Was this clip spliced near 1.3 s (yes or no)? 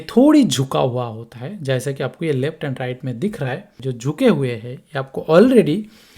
no